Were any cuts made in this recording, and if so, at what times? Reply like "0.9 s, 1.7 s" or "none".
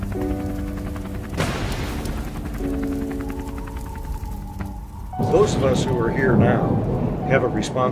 none